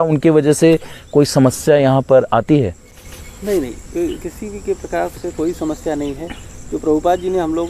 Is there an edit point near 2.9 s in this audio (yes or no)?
no